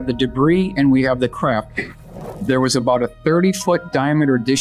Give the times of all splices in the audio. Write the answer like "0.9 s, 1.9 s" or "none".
1.8 s

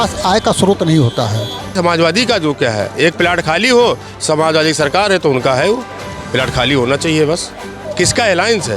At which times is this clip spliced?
1.7 s, 7.8 s

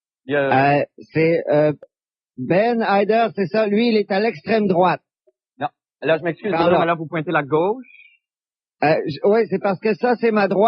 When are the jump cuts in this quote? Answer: 1.6 s

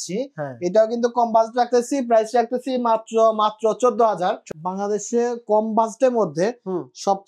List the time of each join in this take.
4.5 s

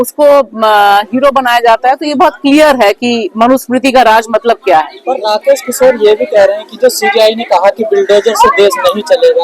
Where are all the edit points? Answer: none

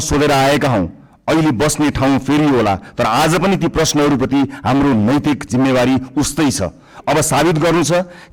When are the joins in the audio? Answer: none

